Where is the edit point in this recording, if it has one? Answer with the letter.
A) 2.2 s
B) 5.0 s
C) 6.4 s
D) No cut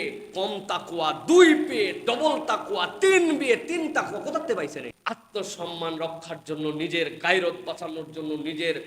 B